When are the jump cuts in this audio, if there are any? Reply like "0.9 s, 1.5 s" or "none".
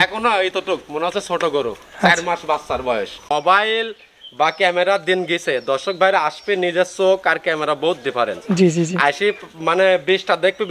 3.2 s